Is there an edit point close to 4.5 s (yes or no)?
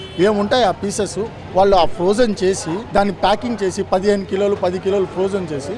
no